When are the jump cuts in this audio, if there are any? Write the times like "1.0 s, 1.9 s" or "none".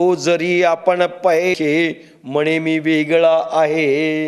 1.6 s